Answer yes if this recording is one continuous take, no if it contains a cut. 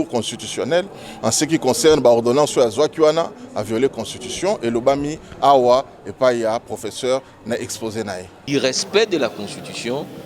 no